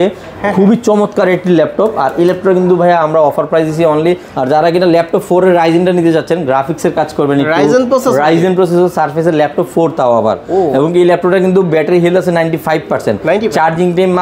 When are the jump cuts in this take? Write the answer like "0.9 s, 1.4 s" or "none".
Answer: 4.3 s